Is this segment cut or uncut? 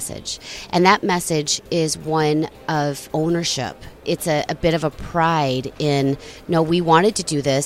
cut